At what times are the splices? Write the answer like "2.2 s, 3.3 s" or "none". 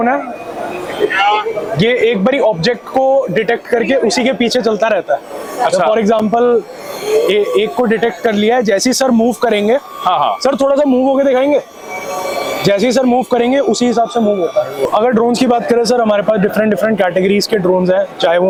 none